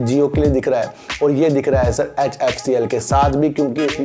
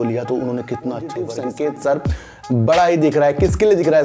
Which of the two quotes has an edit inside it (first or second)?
second